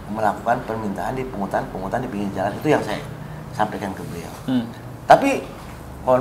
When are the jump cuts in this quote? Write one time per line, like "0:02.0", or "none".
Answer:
none